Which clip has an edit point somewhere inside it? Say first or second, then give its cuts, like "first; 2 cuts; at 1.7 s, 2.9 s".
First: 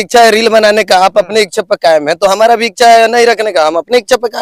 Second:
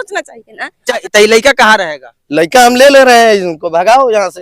second; 1 cut; at 1.0 s